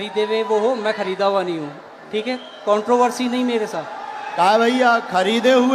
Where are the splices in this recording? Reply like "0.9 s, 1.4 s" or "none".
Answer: none